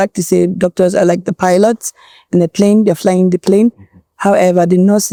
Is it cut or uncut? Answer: uncut